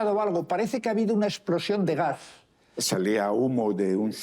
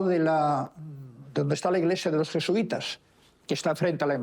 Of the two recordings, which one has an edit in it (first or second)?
first